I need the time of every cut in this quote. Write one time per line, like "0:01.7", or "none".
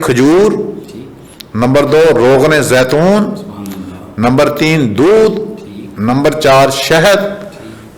none

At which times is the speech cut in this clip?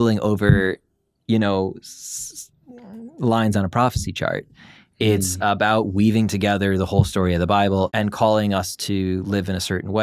0:07.9

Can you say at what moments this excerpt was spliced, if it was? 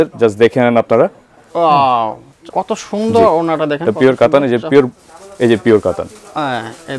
0:02.5

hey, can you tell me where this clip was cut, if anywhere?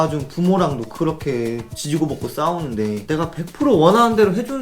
0:03.0

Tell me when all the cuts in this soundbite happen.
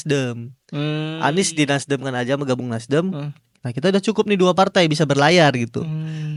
none

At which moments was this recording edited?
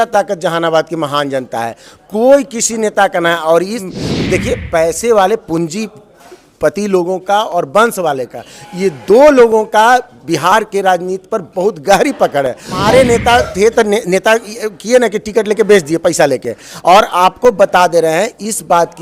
0:03.8
0:12.8

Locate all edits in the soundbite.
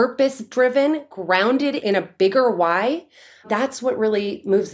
0:01.8

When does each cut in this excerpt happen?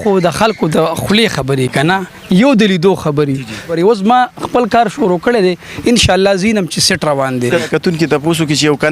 0:03.7
0:07.6

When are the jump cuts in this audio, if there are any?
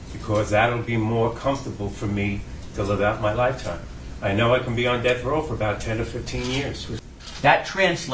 0:06.8

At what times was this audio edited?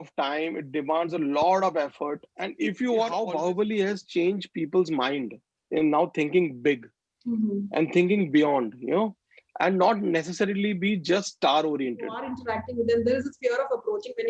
0:03.2
0:12.3

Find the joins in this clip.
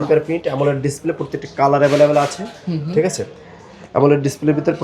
none

